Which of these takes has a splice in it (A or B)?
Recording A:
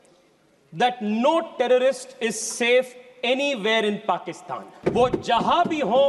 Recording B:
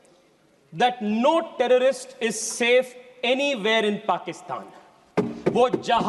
A